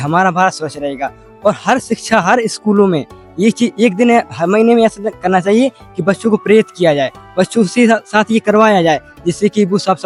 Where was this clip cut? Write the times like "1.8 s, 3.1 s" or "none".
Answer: none